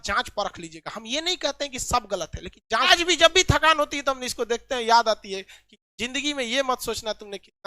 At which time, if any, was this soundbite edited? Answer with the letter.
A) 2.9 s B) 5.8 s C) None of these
A